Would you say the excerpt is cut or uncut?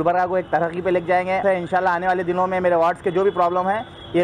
cut